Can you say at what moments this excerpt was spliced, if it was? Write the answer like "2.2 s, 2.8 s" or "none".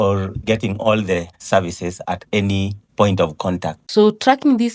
3.8 s